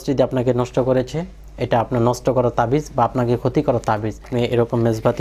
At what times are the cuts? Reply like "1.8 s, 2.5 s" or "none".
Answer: 4.3 s